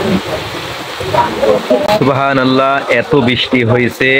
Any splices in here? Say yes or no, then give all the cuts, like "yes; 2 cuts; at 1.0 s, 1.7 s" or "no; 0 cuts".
yes; 1 cut; at 1.6 s